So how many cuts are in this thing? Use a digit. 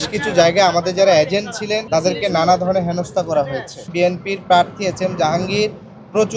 2